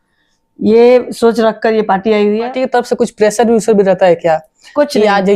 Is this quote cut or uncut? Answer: cut